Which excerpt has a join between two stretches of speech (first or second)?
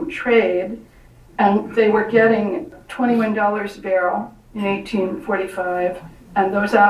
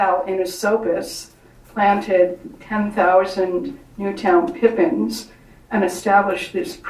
first